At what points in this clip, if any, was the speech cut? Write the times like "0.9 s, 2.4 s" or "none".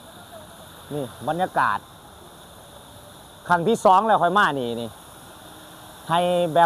none